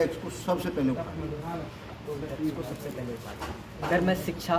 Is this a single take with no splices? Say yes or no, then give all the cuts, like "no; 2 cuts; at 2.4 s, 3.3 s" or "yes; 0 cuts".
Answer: yes; 0 cuts